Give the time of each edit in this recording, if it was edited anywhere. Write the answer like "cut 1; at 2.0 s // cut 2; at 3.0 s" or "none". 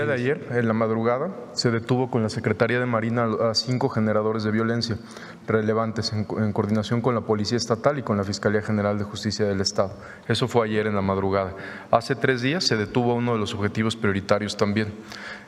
none